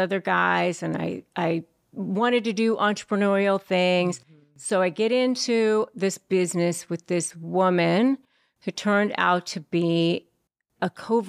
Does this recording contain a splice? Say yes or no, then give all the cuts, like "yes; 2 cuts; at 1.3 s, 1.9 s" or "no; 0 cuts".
no; 0 cuts